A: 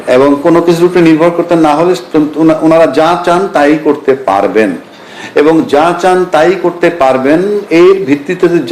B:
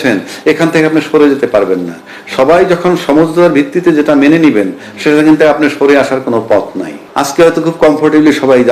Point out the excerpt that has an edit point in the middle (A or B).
B